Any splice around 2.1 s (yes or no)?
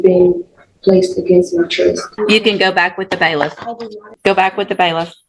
yes